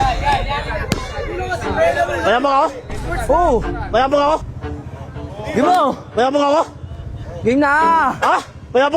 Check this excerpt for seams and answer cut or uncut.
cut